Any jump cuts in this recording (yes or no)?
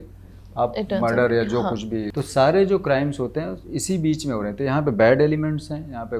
yes